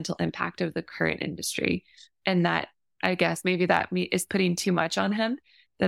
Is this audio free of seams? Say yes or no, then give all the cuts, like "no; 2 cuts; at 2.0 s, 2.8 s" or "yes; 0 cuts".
yes; 0 cuts